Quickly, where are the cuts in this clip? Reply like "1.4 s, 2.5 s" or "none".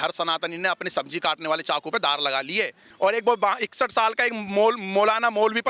2.8 s